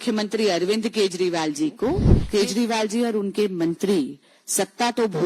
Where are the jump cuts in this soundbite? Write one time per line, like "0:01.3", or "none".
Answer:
0:02.1